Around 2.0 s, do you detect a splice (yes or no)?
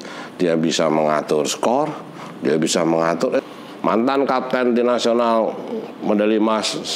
no